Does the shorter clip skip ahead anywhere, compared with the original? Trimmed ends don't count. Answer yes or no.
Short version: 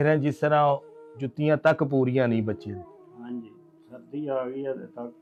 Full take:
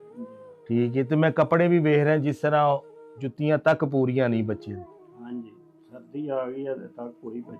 no